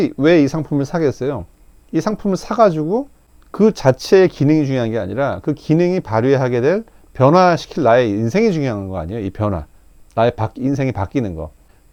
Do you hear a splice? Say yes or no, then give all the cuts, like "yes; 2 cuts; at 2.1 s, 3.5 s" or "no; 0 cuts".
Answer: no; 0 cuts